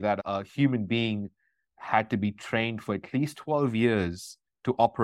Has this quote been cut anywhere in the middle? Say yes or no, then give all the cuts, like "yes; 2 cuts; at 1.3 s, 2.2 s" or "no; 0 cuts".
no; 0 cuts